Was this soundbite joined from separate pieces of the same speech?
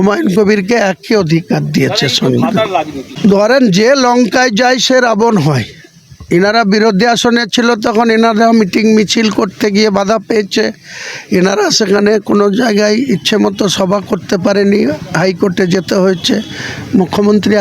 yes; 1 cut; at 3.1 s

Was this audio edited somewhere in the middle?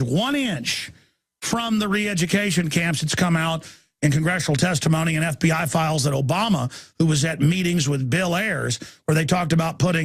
no; 0 cuts

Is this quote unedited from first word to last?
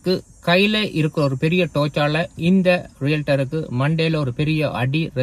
yes; 0 cuts

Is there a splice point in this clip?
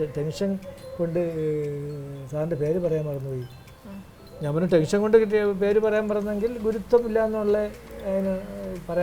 no; 0 cuts

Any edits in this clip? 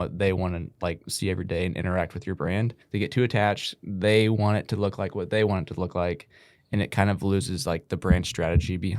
yes; 1 cut; at 2.8 s

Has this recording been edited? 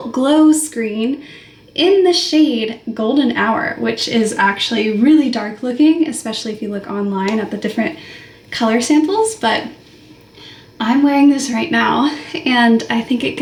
no; 0 cuts

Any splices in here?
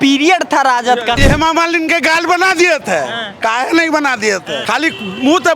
yes; 2 cuts; at 1.2 s, 4.5 s

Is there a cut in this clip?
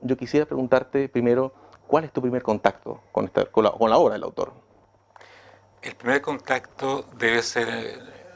no; 0 cuts

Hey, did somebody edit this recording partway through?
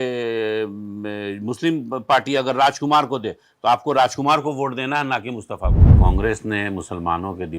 yes; 1 cut; at 5.9 s

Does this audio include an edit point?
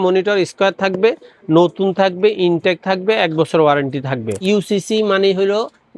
yes; 1 cut; at 4.3 s

